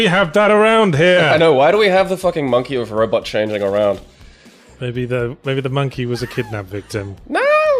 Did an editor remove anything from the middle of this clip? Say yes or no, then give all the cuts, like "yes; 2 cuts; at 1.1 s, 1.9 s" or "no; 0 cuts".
no; 0 cuts